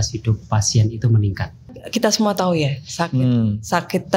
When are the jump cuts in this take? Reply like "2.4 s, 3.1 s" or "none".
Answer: 1.8 s

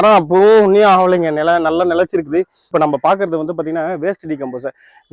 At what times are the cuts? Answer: 2.6 s

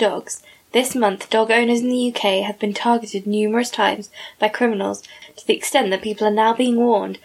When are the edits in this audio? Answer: none

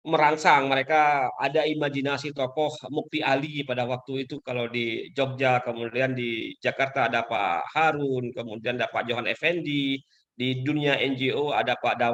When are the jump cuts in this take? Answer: none

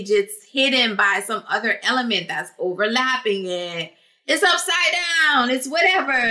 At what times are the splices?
none

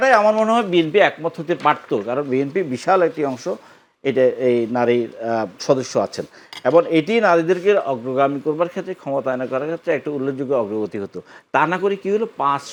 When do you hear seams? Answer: none

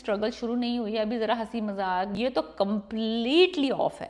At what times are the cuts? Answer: 2.1 s

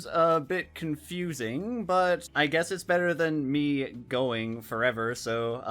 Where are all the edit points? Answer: 2.3 s

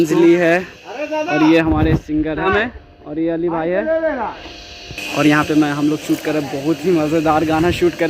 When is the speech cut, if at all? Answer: 2.5 s

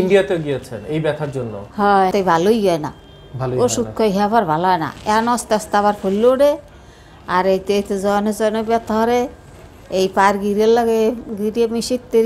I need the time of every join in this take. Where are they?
2.1 s

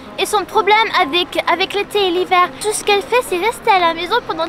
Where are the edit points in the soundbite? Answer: 2.6 s

